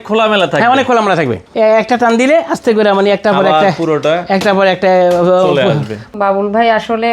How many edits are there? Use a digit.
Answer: 2